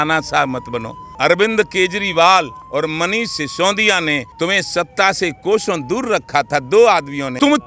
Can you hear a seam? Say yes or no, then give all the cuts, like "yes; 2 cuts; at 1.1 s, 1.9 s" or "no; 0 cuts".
yes; 1 cut; at 1.1 s